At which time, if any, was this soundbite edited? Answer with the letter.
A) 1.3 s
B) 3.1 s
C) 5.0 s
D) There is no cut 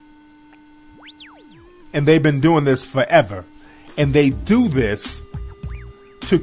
C